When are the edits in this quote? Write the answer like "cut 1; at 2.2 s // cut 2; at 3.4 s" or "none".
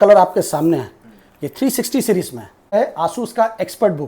cut 1; at 2.7 s